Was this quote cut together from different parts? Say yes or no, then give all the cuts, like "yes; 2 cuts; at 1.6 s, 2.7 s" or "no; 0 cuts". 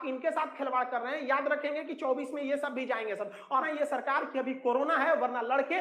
yes; 1 cut; at 3.7 s